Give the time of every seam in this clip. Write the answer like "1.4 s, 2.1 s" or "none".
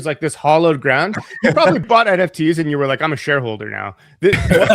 1.8 s